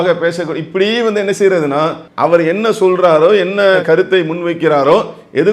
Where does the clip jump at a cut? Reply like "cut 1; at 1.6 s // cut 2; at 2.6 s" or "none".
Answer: cut 1; at 2.0 s